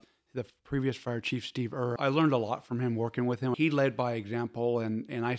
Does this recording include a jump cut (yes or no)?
yes